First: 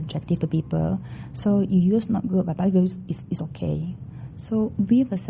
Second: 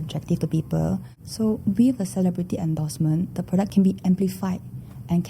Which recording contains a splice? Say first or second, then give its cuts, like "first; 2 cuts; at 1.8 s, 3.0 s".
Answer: second; 2 cuts; at 1.2 s, 3.7 s